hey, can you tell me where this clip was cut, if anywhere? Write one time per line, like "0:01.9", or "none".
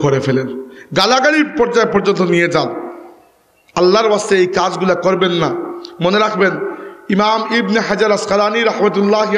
none